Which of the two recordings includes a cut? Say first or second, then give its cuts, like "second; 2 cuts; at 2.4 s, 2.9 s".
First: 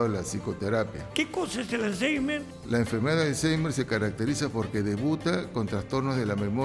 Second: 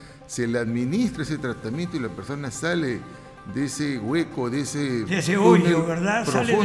first; 2 cuts; at 1.0 s, 2.5 s